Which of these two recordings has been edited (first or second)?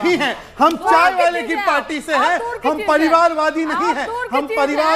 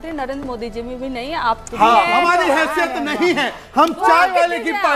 second